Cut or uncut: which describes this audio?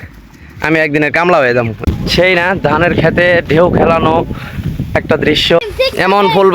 cut